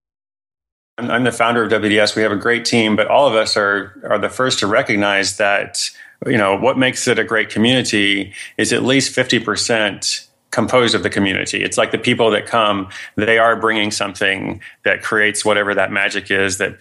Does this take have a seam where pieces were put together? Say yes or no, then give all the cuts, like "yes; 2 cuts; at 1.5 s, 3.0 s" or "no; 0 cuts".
yes; 1 cut; at 1.0 s